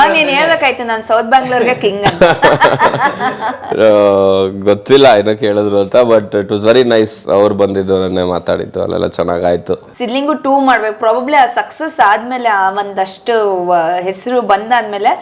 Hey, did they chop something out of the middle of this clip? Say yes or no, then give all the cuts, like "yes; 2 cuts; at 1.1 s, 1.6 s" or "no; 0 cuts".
yes; 1 cut; at 9.9 s